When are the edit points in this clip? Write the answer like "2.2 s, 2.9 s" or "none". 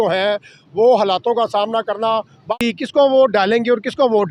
2.6 s